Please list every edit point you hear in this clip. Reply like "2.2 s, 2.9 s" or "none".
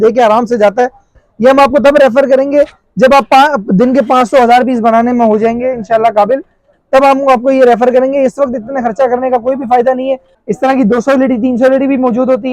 1.2 s, 10.3 s